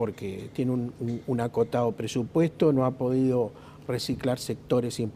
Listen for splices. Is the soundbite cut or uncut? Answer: uncut